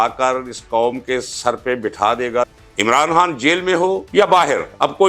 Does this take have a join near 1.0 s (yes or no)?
no